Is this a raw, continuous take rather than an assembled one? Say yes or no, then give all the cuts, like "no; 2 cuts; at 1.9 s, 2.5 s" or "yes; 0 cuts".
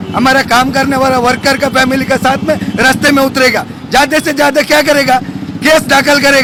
yes; 0 cuts